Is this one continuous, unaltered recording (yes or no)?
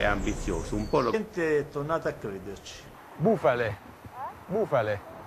yes